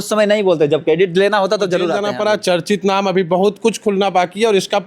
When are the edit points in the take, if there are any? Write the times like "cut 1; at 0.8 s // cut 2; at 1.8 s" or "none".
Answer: cut 1; at 2.0 s